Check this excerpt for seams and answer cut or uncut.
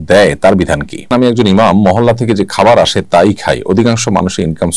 cut